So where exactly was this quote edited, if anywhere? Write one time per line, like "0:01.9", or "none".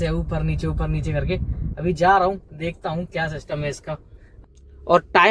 0:04.3